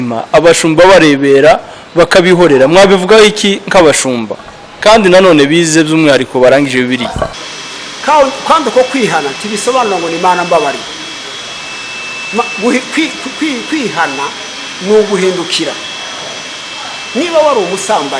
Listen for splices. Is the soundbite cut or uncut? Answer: cut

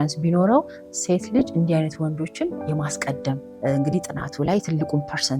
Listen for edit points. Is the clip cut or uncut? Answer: cut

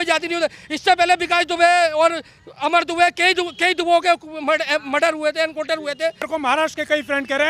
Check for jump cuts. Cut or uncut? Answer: cut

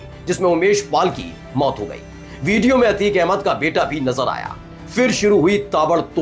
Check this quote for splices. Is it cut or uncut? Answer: uncut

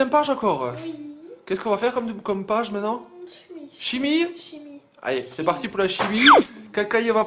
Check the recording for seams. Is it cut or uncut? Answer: uncut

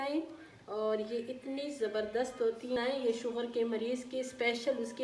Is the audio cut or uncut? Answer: cut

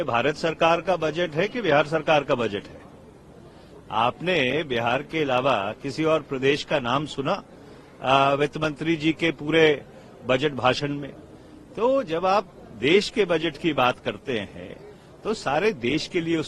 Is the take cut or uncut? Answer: uncut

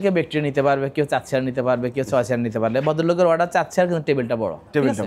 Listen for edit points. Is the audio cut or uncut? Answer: uncut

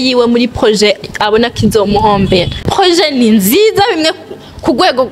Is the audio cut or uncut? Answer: cut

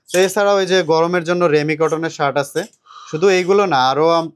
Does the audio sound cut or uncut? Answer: uncut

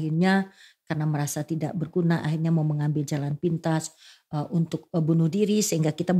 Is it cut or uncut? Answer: uncut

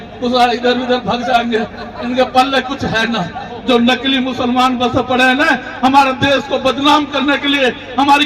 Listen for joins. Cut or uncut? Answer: cut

